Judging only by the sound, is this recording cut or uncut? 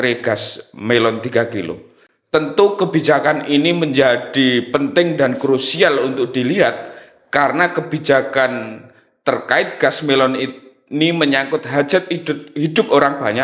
uncut